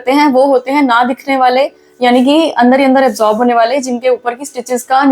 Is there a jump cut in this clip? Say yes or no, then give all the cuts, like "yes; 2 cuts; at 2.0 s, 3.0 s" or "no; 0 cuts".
no; 0 cuts